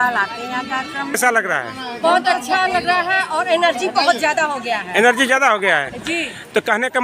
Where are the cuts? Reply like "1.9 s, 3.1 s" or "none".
1.1 s